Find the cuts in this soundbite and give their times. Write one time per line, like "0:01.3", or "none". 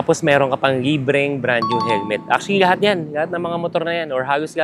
none